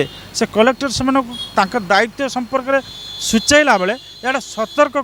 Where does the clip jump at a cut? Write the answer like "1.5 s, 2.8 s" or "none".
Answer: none